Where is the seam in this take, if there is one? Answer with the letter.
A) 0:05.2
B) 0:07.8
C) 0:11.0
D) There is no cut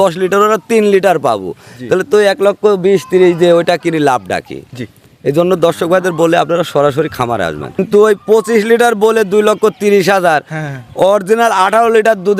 B